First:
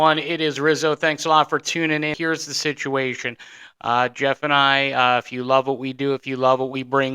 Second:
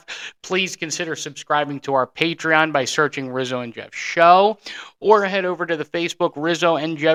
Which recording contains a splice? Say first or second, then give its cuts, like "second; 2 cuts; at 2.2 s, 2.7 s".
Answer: first; 1 cut; at 2.1 s